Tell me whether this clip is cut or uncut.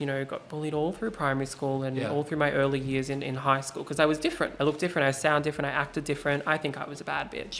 cut